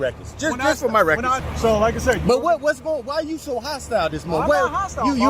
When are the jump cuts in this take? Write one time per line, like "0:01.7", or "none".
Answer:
0:01.4